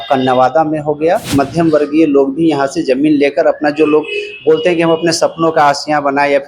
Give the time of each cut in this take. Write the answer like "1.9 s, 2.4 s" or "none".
1.3 s